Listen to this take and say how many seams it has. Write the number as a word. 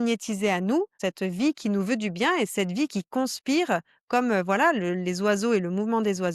one